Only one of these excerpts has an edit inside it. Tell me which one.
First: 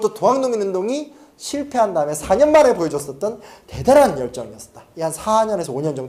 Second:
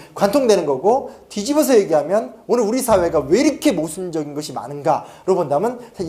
second; 1 cut; at 1.8 s

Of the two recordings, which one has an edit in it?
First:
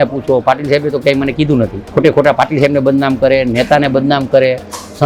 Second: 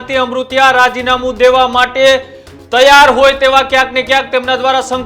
first; 1 cut; at 1.8 s

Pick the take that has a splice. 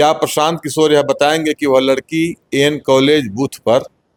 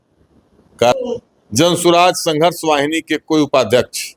second; 1 cut; at 0.9 s

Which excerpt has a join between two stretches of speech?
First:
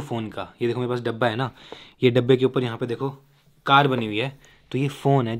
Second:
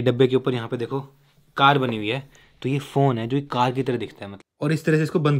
second; 1 cut; at 4.4 s

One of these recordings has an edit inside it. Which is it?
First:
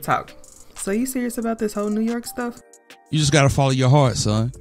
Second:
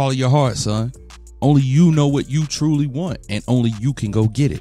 first; 1 cut; at 2.6 s

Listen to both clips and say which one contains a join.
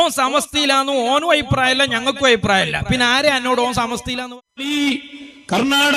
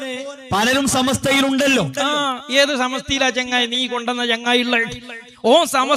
first; 1 cut; at 4.1 s

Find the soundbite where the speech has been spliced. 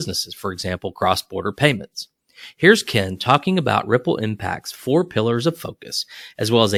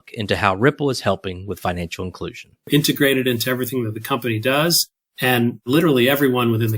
second; 1 cut; at 2.7 s

